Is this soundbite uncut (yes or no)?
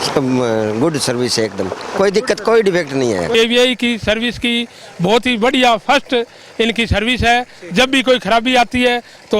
no